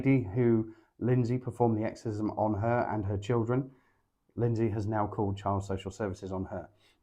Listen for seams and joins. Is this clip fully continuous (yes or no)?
yes